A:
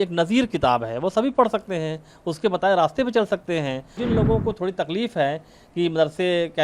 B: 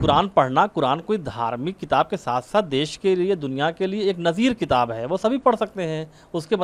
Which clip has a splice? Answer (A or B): A